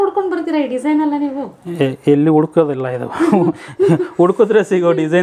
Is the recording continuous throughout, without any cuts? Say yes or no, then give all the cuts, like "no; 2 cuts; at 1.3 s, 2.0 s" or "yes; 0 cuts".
yes; 0 cuts